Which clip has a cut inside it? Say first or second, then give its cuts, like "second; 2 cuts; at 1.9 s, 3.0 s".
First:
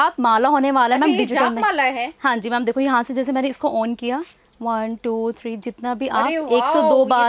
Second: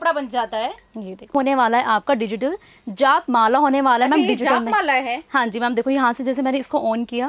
second; 1 cut; at 1.3 s